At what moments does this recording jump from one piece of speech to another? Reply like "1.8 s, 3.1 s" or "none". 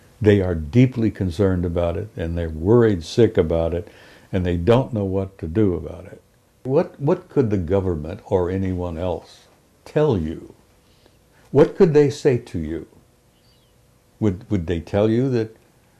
6.6 s